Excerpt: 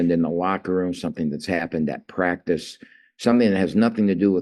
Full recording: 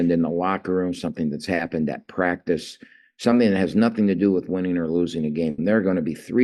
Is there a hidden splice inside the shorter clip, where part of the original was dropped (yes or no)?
no